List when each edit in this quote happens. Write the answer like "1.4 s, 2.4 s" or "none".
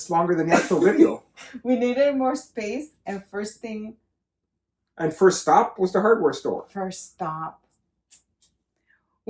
none